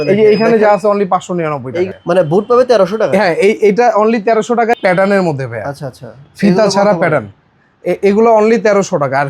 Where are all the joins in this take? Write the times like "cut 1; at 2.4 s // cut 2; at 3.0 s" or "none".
cut 1; at 1.9 s // cut 2; at 4.8 s

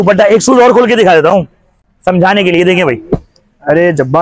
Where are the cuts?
none

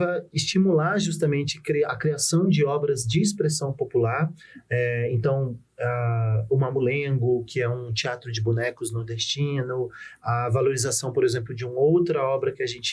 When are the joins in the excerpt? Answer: none

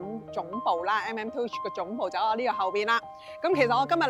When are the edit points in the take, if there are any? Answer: none

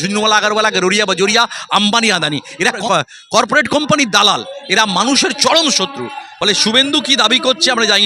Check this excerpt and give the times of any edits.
cut 1; at 2.8 s

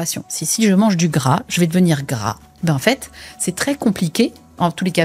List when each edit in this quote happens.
cut 1; at 2.5 s

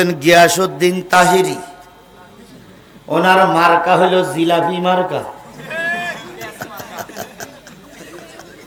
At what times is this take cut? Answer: none

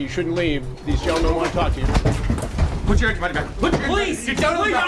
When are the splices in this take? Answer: cut 1; at 2.4 s

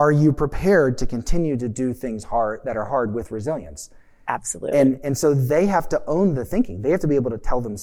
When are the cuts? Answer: none

